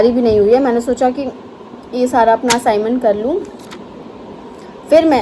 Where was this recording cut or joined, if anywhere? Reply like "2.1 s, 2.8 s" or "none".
none